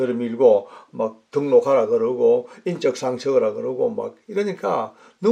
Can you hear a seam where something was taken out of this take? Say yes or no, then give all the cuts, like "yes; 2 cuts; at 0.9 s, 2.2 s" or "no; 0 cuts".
no; 0 cuts